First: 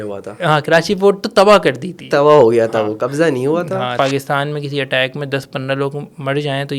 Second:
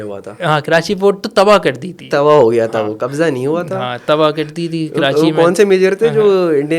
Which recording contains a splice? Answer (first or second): first